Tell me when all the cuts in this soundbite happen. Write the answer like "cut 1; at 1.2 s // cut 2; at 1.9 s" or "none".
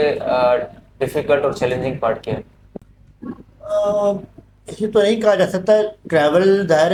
none